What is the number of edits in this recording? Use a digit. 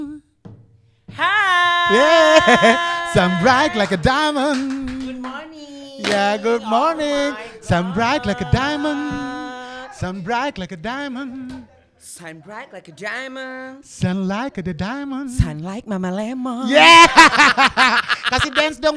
0